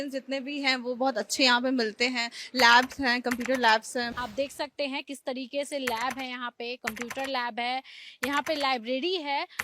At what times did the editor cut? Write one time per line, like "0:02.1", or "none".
0:04.1